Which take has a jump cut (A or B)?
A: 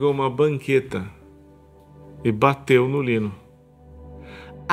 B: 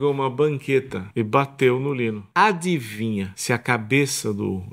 B